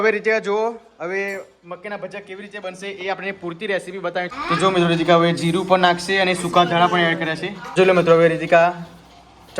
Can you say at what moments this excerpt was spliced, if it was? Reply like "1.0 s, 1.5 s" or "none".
4.3 s, 7.7 s

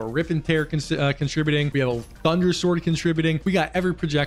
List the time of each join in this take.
1.7 s, 3.4 s

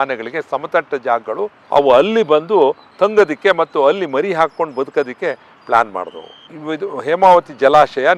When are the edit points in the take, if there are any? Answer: 1.6 s, 6.5 s

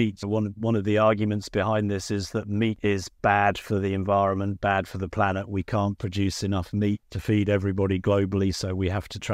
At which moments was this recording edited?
2.8 s, 7.1 s

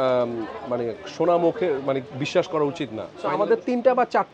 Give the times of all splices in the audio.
3.1 s

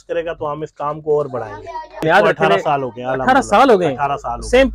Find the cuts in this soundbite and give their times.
1.9 s

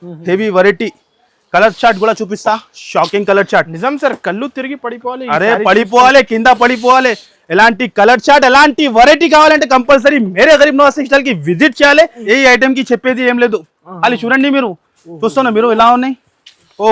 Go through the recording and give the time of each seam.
12.2 s

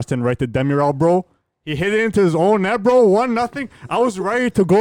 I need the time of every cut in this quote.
none

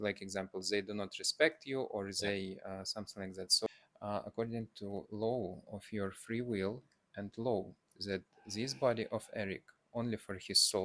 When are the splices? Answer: 3.7 s

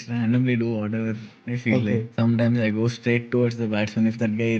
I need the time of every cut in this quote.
2.1 s

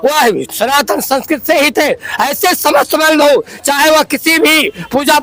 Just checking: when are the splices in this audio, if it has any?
none

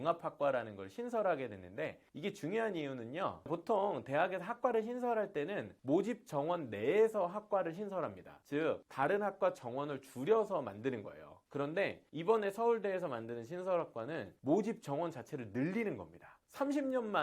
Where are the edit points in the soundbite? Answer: 8.9 s, 14.3 s, 16.3 s

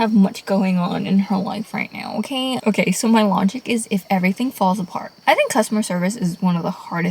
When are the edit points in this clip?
5.2 s

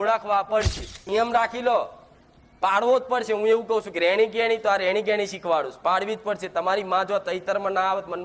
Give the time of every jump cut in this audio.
1.0 s

